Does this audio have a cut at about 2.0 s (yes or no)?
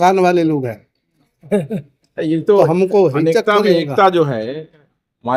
no